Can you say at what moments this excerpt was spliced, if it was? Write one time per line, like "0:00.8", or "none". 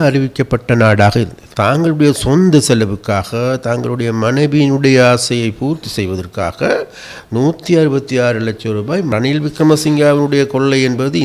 0:01.4
0:09.1